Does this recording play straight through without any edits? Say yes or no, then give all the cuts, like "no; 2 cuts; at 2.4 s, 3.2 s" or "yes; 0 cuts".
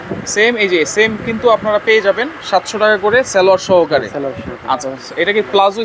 yes; 0 cuts